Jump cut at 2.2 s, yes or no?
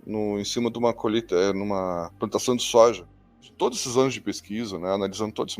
no